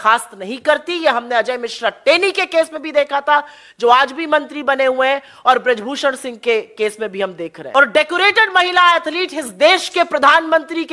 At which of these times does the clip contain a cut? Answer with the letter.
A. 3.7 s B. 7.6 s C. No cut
B